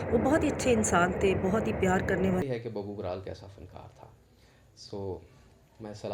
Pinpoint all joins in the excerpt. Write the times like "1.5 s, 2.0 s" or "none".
2.4 s